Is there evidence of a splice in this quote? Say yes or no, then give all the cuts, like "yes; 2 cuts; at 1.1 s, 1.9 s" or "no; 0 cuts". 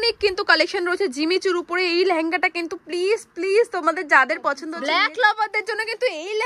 yes; 1 cut; at 4.7 s